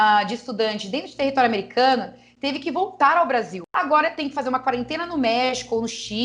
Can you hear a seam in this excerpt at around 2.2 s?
no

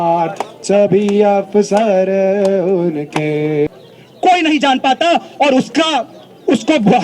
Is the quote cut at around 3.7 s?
yes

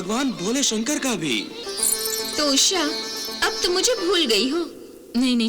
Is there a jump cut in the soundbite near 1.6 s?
yes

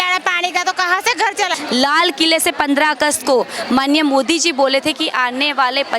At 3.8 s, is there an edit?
no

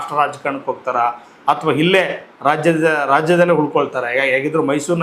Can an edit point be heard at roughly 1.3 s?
no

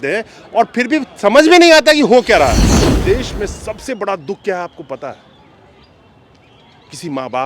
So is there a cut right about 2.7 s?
yes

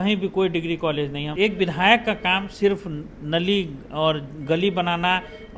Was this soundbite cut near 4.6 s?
no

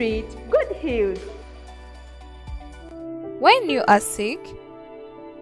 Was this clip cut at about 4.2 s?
no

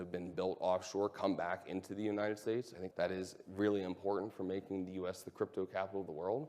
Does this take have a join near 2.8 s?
yes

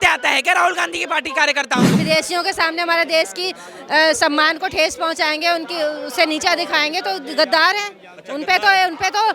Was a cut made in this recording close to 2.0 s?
yes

